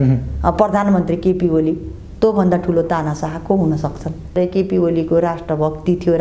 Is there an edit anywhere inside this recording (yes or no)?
yes